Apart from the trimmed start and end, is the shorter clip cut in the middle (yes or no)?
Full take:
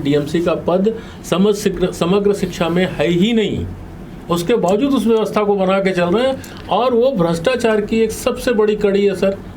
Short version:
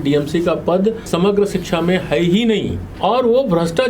yes